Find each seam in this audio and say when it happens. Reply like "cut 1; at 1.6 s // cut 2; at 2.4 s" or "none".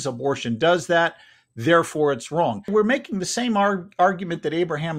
cut 1; at 2.7 s